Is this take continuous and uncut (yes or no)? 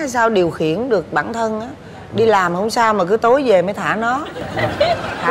yes